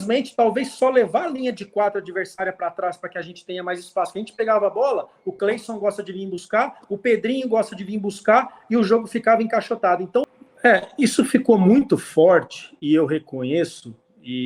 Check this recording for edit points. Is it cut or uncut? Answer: cut